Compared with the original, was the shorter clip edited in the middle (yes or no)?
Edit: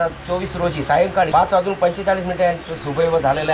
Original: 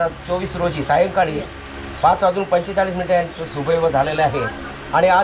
yes